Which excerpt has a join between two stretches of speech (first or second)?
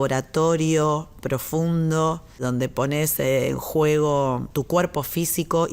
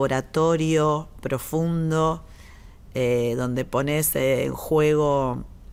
first